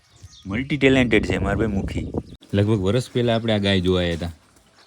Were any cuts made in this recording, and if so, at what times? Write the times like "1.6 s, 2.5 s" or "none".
2.3 s